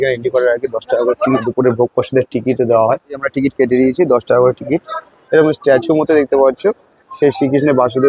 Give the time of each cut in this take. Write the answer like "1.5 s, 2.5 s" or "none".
1.4 s, 3.2 s, 5.1 s